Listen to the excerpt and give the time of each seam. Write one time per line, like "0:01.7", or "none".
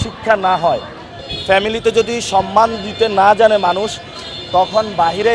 none

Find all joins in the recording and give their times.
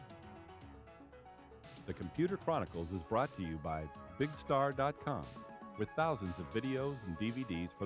0:01.9

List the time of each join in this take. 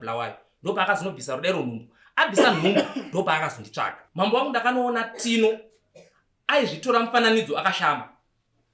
0:04.0

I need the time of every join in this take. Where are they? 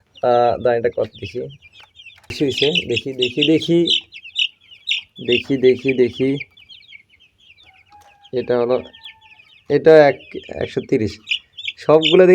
0:02.4

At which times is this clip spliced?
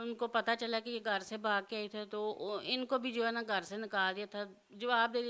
none

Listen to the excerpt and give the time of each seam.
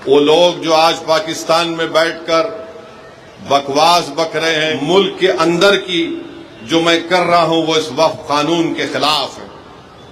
0:04.7

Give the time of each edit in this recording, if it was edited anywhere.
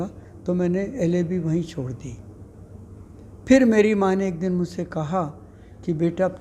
none

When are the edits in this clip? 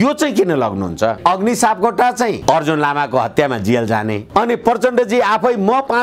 0:01.2
0:02.4
0:04.2

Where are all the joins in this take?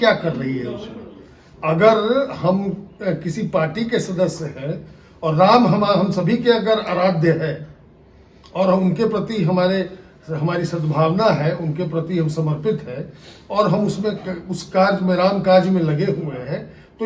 none

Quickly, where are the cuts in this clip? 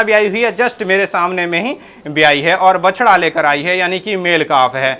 none

